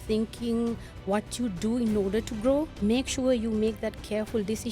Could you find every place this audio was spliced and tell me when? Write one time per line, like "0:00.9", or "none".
0:02.7